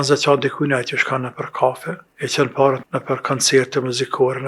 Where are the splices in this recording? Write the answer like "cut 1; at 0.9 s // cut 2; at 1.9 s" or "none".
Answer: cut 1; at 2.0 s // cut 2; at 2.8 s